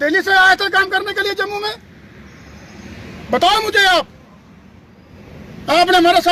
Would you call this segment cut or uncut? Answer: uncut